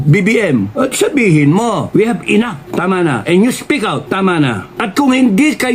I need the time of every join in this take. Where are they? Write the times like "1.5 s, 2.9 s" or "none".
1.9 s, 2.6 s, 4.0 s, 4.7 s